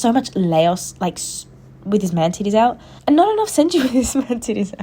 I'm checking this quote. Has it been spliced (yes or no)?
yes